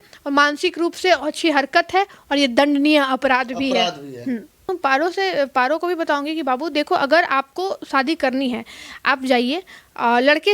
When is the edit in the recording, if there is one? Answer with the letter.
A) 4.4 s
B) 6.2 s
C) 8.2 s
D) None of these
A